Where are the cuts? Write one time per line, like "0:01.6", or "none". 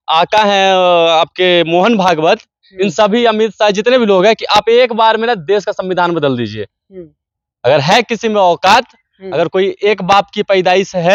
none